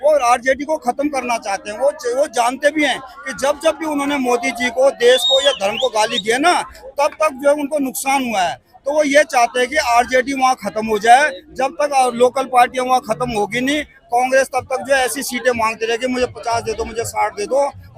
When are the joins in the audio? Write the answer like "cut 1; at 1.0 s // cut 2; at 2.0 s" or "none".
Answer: none